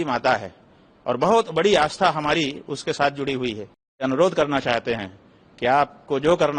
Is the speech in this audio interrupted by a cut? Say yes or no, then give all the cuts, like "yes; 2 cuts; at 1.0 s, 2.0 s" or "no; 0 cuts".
yes; 1 cut; at 4.0 s